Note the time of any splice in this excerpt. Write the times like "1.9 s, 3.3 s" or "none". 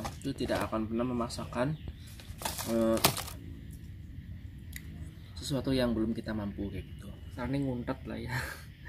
7.3 s